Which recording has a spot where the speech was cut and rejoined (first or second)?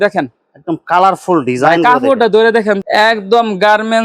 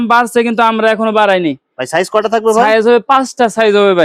first